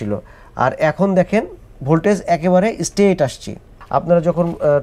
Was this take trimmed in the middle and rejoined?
yes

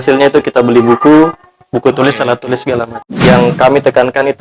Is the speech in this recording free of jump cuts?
no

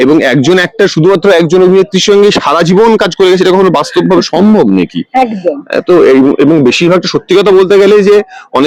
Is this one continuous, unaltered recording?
yes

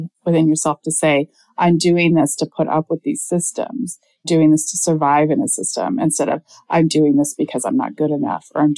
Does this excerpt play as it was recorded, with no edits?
yes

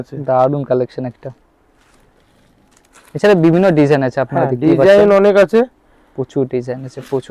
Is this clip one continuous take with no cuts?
yes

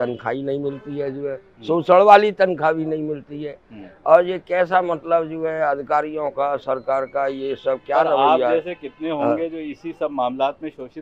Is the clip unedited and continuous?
yes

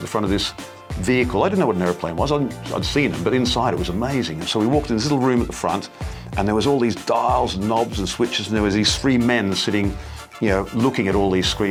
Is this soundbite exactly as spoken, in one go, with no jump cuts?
yes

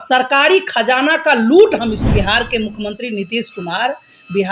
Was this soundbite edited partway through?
yes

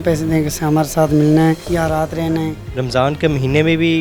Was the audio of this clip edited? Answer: yes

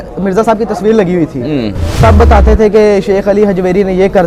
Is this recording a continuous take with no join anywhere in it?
no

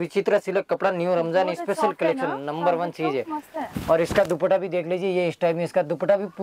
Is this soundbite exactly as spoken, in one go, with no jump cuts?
yes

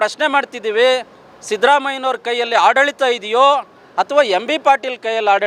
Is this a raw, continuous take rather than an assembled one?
yes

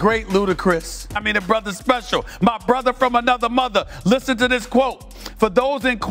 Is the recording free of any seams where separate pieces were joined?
no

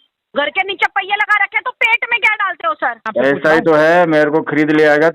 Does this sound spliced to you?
yes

